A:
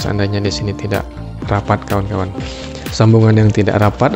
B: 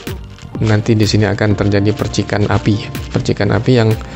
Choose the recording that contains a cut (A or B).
A